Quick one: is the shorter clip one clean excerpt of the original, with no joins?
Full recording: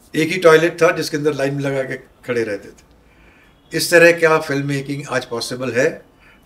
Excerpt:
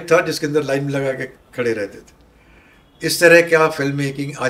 yes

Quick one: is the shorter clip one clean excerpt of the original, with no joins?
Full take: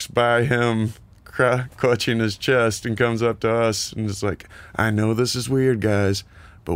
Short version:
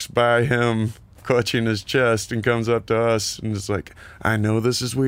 no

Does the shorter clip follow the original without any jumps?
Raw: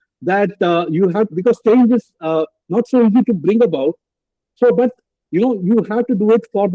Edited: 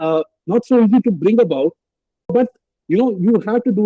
no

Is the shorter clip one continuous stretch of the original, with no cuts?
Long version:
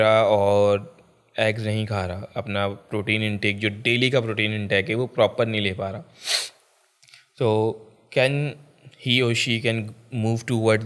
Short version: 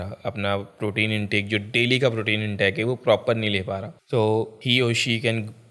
no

